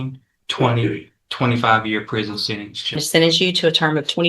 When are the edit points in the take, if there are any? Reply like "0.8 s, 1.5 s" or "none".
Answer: 3.0 s